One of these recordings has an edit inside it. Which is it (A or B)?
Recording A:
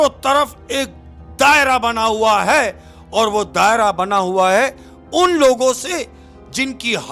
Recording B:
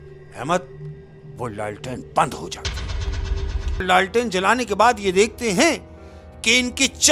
B